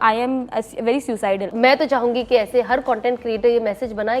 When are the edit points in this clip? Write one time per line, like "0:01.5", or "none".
0:01.5